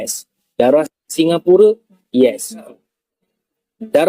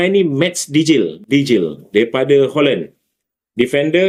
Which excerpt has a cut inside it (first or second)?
first